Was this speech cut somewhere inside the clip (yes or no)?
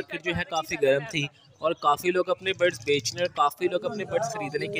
no